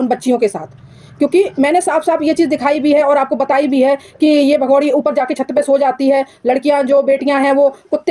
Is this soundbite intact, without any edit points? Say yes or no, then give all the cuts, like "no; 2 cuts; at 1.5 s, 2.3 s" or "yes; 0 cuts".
yes; 0 cuts